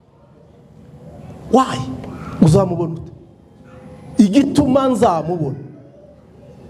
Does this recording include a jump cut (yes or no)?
no